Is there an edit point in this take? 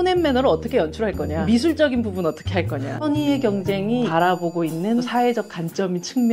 yes; 4 cuts; at 1.3 s, 3.1 s, 4.1 s, 5.1 s

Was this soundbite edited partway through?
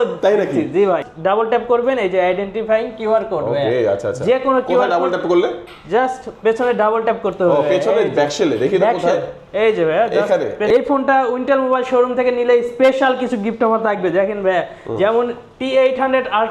yes; 2 cuts; at 1.1 s, 10.7 s

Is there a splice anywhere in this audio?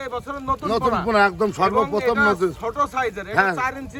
no; 0 cuts

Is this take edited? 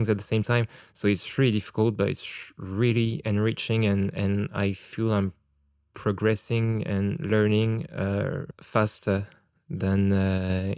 yes; 1 cut; at 8.5 s

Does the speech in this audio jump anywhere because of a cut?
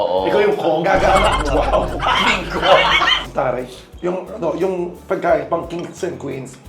yes; 1 cut; at 3.2 s

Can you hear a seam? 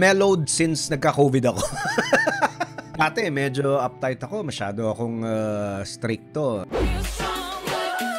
yes; 2 cuts; at 2.9 s, 6.7 s

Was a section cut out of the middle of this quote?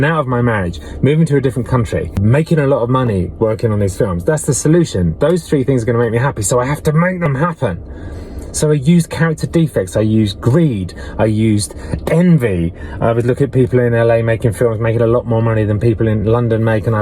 yes; 1 cut; at 2.2 s

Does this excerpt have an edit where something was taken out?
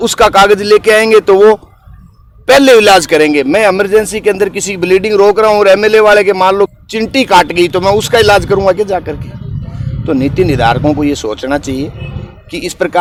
no; 0 cuts

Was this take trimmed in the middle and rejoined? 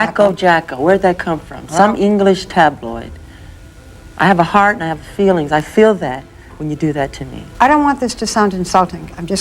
no; 0 cuts

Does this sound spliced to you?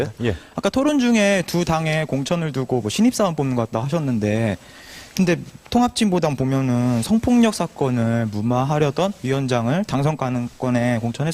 no; 0 cuts

